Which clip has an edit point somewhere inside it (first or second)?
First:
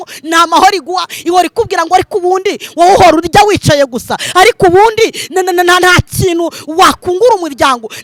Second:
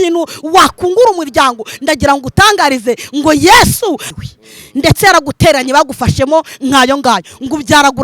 second